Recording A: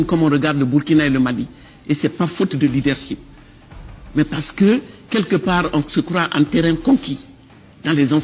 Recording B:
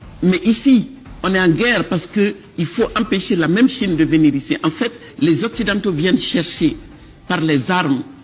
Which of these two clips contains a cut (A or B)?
B